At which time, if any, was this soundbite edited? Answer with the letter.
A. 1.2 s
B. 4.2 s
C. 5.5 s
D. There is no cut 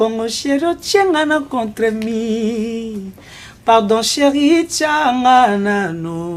D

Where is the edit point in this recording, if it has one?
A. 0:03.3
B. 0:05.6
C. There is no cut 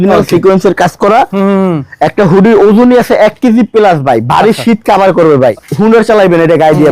B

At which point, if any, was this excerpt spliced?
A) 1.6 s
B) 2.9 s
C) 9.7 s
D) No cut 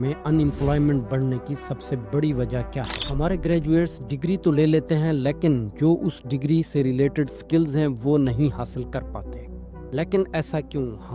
B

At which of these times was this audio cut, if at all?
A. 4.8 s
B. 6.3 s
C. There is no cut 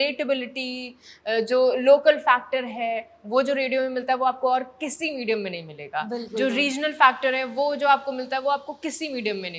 C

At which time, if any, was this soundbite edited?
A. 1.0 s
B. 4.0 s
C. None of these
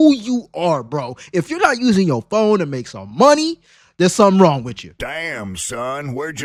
C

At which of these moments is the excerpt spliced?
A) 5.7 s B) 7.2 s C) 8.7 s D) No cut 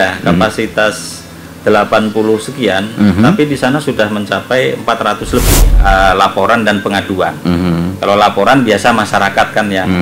A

